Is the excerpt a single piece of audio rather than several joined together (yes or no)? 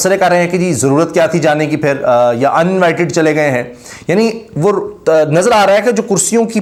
yes